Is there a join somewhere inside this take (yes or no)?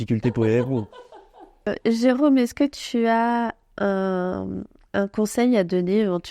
yes